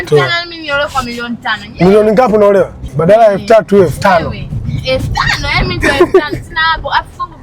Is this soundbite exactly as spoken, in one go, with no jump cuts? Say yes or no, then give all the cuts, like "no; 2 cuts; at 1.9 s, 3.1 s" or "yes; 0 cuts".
no; 1 cut; at 2.8 s